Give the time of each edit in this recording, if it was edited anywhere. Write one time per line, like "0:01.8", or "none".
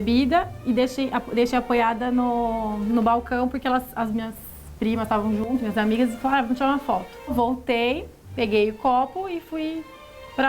0:07.3